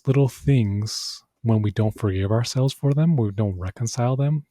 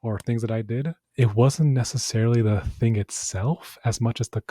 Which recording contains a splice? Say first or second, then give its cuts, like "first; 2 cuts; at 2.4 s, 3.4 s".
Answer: second; 1 cut; at 1.0 s